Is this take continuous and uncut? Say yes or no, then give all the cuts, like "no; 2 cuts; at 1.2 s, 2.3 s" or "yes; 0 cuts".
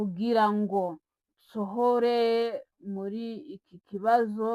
yes; 0 cuts